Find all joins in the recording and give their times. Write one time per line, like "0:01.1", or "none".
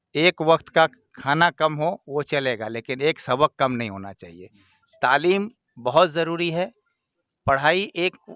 none